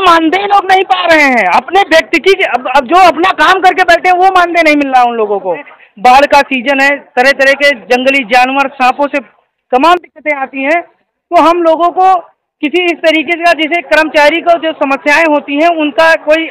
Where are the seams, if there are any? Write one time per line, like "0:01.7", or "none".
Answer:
0:05.7